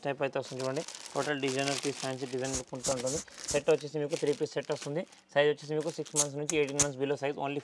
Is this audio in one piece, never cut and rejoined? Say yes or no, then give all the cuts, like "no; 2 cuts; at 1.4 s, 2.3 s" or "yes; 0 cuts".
yes; 0 cuts